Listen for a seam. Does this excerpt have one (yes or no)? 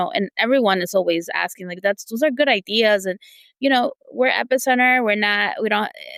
no